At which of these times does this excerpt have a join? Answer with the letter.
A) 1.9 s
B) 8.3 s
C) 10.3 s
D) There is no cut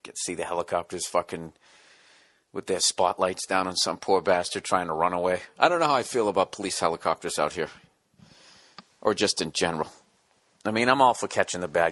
B